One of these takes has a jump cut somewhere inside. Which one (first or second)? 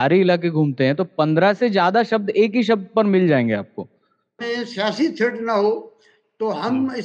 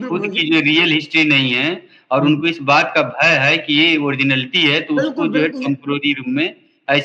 first